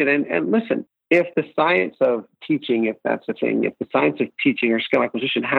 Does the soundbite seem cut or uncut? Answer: cut